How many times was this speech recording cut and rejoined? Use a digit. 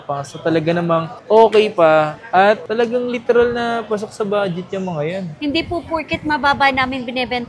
1